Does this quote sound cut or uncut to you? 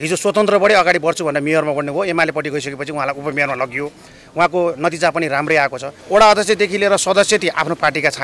cut